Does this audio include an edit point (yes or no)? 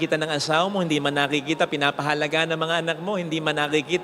no